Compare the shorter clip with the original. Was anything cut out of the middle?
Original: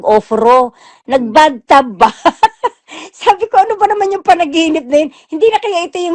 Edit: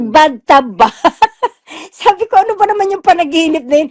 no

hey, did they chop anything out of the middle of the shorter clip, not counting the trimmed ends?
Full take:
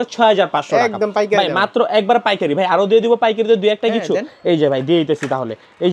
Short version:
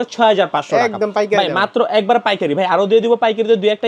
no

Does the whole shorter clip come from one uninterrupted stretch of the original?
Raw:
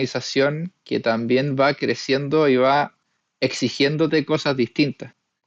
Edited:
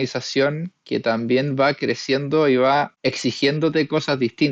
no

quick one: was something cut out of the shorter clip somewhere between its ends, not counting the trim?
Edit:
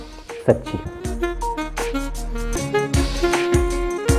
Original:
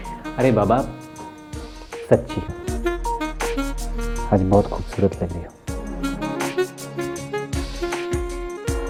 yes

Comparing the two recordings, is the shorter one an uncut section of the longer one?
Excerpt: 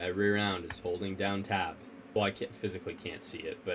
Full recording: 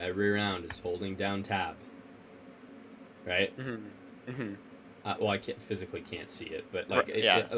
no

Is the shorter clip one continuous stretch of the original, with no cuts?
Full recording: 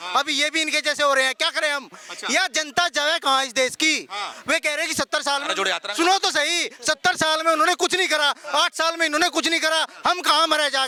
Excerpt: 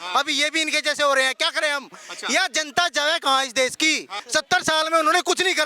no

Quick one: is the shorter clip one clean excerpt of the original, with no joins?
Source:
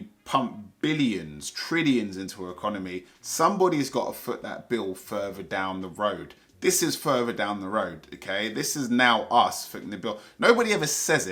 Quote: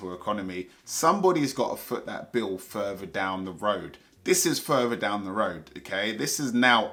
yes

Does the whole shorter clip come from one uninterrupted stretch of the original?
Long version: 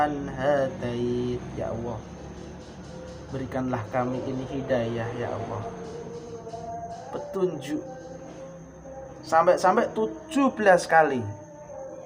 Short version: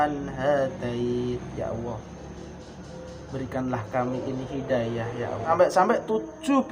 no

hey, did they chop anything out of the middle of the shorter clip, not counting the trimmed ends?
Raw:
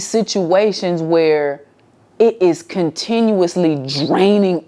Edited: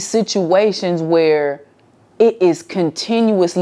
no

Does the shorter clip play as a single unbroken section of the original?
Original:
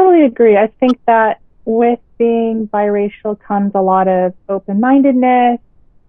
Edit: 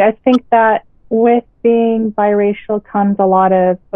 yes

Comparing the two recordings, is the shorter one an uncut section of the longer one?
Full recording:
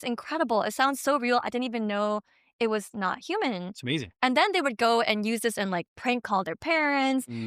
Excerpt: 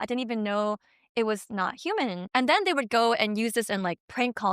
no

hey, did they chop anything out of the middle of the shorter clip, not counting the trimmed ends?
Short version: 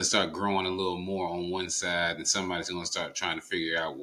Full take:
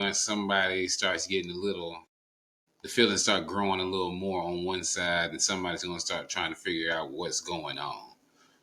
no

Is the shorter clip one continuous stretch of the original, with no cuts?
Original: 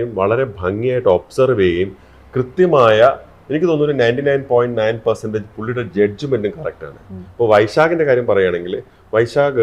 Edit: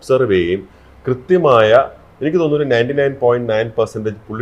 yes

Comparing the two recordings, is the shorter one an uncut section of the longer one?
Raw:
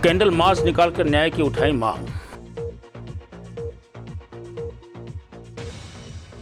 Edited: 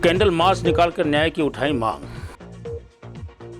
no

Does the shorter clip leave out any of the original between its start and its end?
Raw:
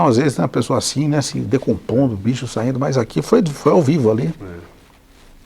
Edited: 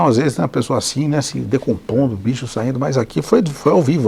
no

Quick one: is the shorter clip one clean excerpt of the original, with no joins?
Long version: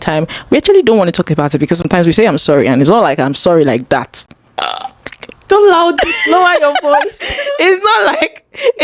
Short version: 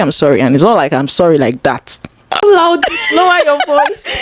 no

